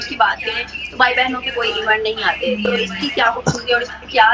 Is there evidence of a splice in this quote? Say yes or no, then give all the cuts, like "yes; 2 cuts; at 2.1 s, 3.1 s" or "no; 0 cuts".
no; 0 cuts